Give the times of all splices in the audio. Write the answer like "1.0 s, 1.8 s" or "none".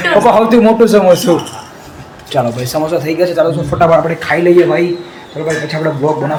none